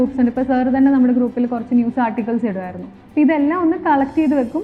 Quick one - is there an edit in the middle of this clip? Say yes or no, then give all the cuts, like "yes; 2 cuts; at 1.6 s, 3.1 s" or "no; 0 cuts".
no; 0 cuts